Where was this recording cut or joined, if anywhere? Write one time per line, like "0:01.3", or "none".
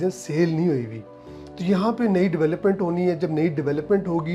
none